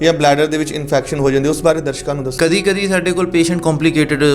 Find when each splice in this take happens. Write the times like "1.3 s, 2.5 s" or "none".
2.3 s